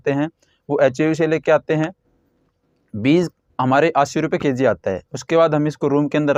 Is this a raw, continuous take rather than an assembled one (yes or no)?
yes